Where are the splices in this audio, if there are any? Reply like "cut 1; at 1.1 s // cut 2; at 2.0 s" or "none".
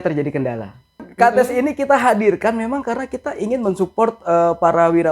cut 1; at 1.1 s